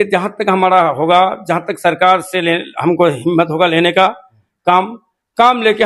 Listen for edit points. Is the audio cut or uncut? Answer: uncut